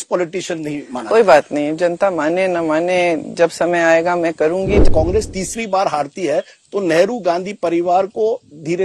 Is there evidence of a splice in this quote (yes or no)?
yes